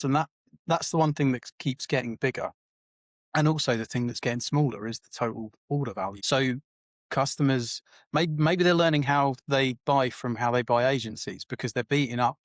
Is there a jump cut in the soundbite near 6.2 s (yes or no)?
yes